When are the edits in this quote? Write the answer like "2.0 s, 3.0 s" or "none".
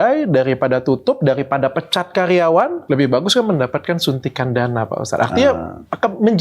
2.8 s